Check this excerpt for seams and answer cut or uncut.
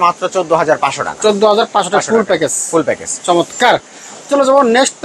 uncut